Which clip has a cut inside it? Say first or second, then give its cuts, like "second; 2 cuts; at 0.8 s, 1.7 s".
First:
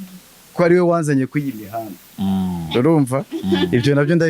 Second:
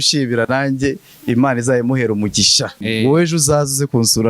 second; 1 cut; at 2.8 s